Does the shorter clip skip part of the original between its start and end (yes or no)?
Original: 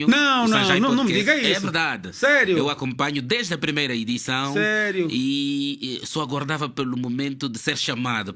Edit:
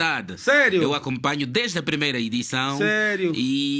no